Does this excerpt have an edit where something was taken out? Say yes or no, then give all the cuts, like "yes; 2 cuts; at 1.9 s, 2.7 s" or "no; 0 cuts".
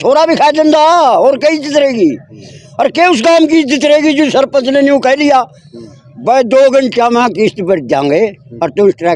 no; 0 cuts